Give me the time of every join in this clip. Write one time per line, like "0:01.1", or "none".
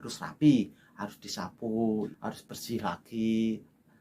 0:02.1